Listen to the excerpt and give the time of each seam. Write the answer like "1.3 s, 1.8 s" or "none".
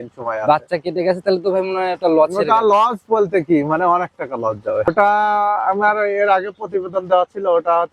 4.9 s